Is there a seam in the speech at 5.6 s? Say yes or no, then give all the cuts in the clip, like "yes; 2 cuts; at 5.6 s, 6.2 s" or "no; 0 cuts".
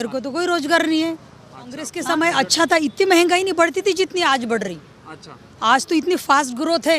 no; 1 cut; at 1.9 s